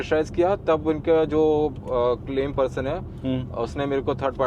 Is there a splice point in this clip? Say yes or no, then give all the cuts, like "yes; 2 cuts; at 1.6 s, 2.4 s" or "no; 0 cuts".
no; 0 cuts